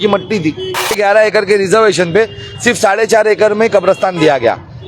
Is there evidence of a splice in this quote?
yes; 1 cut; at 1.0 s

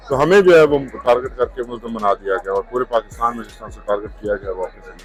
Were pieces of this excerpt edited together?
no; 0 cuts

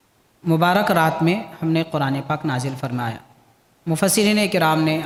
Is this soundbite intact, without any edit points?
yes; 0 cuts

